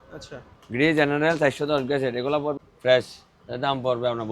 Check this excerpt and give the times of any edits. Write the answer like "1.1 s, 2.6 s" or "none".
2.6 s